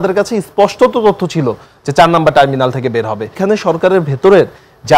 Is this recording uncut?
no; 1 cut; at 3.4 s

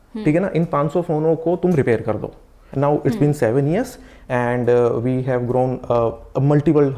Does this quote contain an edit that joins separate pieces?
yes; 1 cut; at 2.6 s

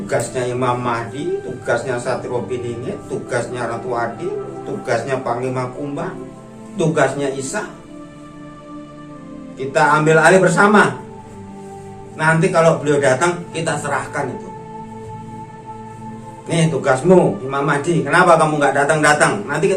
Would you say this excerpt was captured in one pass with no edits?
no; 2 cuts; at 14.6 s, 16.3 s

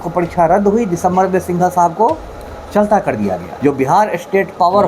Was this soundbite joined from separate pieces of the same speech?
yes; 1 cut; at 3.5 s

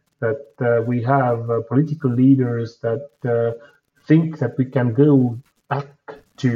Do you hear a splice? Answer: no; 0 cuts

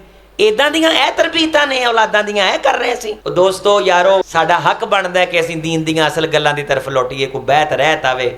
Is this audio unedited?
no; 2 cuts; at 3.1 s, 4.2 s

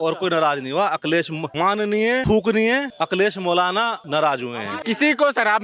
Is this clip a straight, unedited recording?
no; 4 cuts; at 1.8 s, 2.9 s, 4.0 s, 4.7 s

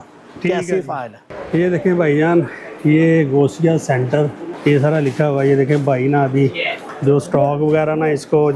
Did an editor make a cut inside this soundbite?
yes; 2 cuts; at 1.3 s, 4.5 s

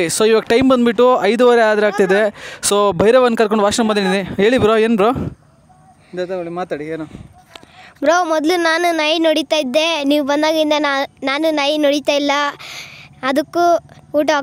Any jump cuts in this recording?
no; 0 cuts

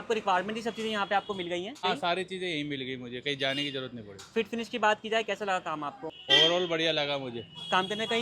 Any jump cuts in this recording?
yes; 2 cuts; at 1.8 s, 6.1 s

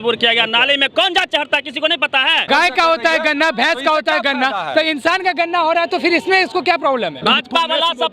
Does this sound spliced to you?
yes; 2 cuts; at 2.5 s, 7.2 s

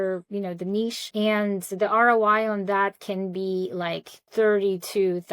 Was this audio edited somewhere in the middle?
yes; 2 cuts; at 1.1 s, 4.1 s

